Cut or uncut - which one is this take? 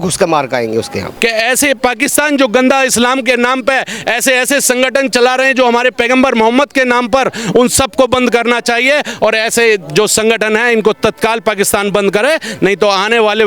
cut